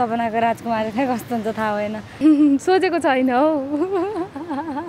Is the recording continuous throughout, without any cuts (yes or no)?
no